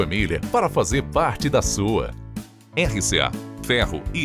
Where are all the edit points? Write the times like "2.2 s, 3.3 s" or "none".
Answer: none